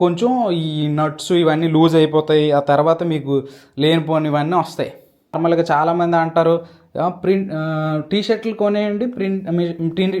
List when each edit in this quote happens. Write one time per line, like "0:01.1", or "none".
0:05.4